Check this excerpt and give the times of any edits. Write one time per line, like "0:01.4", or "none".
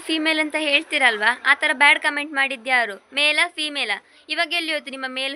none